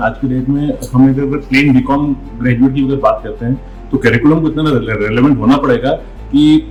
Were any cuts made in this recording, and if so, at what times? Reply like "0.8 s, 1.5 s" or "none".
none